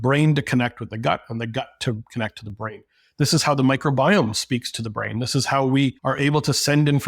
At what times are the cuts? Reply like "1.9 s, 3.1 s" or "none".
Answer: 6.0 s